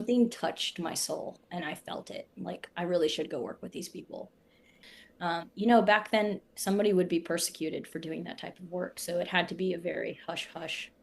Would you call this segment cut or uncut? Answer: cut